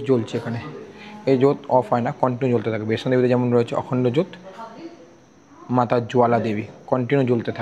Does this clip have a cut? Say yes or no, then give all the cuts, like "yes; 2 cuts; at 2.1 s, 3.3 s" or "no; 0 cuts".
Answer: no; 0 cuts